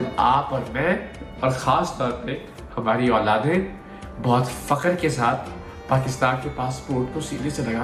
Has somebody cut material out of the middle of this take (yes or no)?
no